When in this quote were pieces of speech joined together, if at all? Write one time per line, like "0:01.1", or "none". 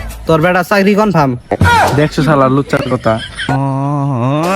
0:03.5